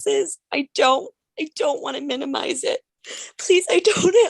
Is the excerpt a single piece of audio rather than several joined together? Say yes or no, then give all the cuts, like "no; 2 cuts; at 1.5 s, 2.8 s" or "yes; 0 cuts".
no; 1 cut; at 3.0 s